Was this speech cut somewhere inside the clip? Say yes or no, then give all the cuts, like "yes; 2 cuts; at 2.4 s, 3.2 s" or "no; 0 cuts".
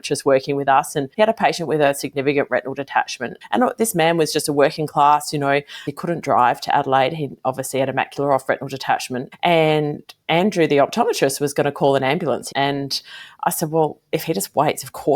yes; 4 cuts; at 1.0 s, 5.8 s, 9.2 s, 12.5 s